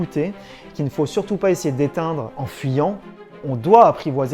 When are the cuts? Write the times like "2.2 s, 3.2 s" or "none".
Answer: 2.4 s, 3.4 s